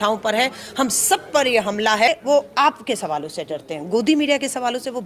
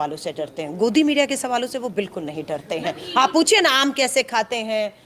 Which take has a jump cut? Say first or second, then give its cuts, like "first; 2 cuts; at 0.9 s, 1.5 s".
first; 1 cut; at 2.1 s